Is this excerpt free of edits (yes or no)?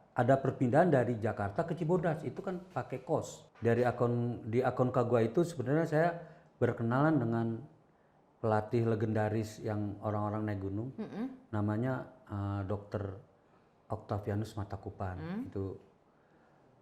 no